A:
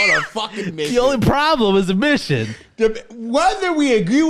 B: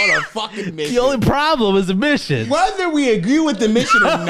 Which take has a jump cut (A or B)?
B